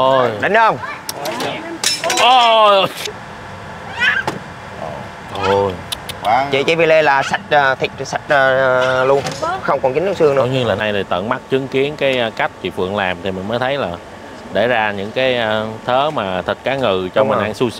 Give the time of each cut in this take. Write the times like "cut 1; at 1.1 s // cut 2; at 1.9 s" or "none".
cut 1; at 2.8 s // cut 2; at 10.8 s